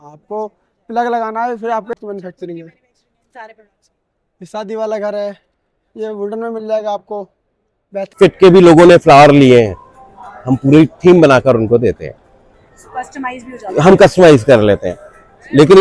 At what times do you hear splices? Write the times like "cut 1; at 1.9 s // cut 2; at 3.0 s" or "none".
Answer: cut 1; at 1.9 s // cut 2; at 8.1 s